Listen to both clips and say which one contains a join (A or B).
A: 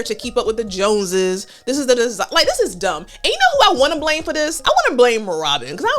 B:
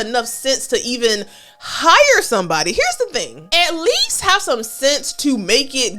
A